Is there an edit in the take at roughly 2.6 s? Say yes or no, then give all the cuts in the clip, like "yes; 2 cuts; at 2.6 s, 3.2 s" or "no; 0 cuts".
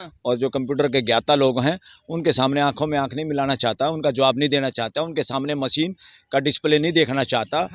no; 0 cuts